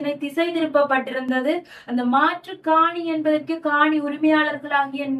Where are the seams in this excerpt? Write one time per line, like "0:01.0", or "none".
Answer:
none